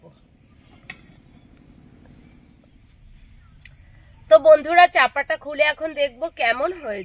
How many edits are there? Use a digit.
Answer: 1